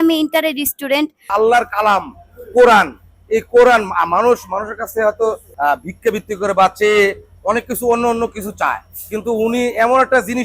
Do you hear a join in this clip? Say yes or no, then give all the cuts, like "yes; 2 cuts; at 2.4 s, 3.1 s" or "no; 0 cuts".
yes; 2 cuts; at 1.2 s, 5.5 s